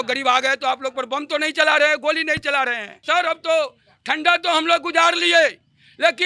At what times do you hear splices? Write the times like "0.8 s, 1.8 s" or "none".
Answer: 3.0 s